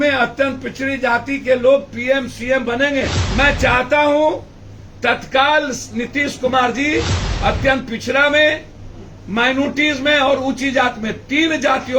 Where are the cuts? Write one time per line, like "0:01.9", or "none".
0:03.2